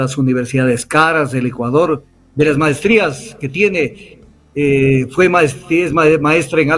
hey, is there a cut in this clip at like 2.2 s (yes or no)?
yes